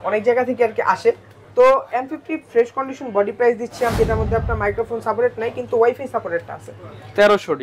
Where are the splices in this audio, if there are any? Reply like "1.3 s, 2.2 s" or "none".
3.9 s

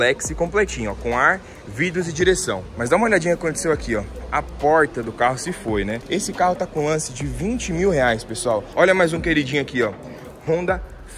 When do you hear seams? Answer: 2.7 s, 6.0 s, 8.7 s

